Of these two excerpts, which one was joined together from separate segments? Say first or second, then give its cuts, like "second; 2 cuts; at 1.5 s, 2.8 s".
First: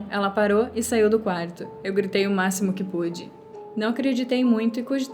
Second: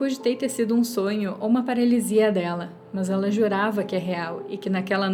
first; 1 cut; at 3.5 s